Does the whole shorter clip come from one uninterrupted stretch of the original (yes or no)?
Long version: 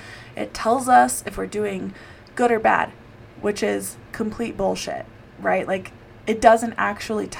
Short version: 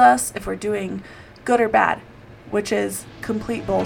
yes